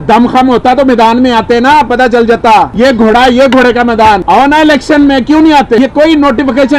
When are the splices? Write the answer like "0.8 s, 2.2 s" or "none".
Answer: 2.7 s, 4.2 s, 5.8 s